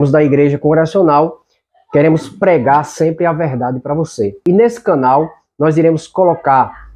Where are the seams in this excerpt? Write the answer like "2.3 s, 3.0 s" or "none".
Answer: 4.4 s